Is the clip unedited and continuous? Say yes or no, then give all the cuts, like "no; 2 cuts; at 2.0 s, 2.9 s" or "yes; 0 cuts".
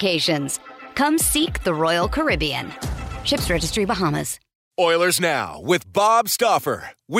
no; 1 cut; at 4.5 s